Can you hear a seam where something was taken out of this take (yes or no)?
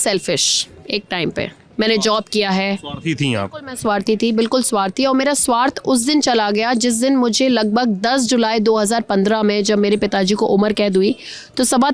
no